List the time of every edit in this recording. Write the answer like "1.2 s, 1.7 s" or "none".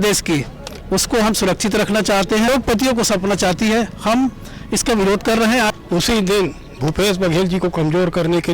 2.5 s, 5.8 s